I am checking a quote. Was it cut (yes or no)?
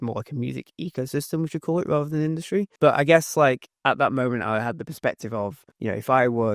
yes